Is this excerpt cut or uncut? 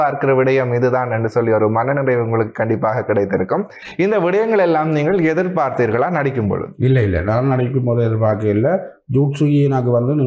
uncut